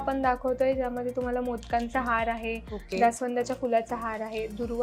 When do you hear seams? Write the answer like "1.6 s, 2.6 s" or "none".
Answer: none